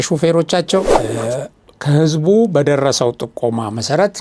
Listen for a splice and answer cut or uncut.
cut